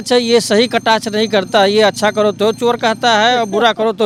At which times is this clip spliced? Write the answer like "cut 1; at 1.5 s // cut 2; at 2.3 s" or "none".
none